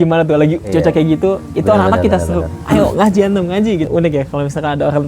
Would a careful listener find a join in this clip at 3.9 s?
yes; 1 cut; at 3.9 s

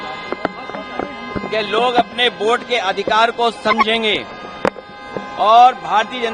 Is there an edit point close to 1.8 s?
no; 0 cuts

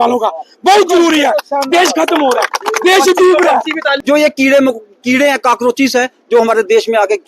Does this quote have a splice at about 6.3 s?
no; 1 cut; at 3.9 s

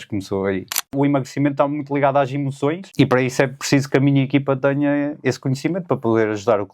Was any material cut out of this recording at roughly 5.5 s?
no; 2 cuts; at 0.9 s, 2.8 s

